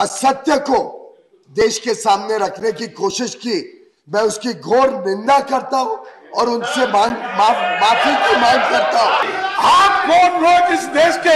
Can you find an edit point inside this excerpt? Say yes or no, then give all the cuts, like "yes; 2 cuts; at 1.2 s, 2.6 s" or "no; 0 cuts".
yes; 1 cut; at 9.2 s